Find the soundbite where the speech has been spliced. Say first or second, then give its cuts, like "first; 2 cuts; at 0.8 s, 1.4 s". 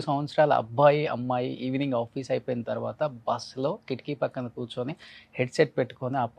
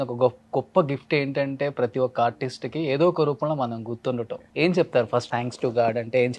second; 2 cuts; at 4.4 s, 5.3 s